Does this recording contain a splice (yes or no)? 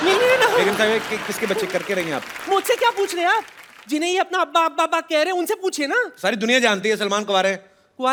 no